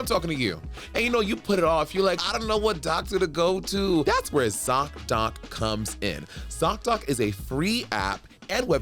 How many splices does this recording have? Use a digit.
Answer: 2